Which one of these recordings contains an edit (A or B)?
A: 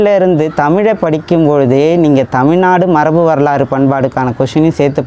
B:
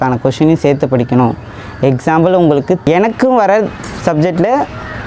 B